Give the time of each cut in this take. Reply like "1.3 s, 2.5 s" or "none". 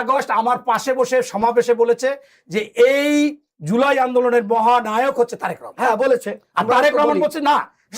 none